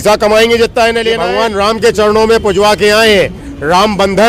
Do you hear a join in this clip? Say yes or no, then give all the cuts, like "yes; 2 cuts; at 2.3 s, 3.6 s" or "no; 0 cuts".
yes; 1 cut; at 1.2 s